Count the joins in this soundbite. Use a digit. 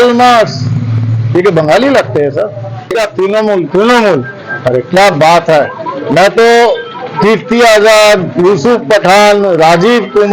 1